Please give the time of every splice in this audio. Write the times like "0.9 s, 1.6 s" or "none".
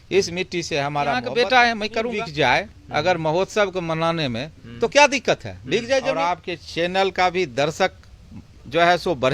1.2 s, 2.2 s, 6.2 s